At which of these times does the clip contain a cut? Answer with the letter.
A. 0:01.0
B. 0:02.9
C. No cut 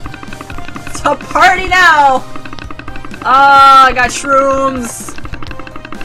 A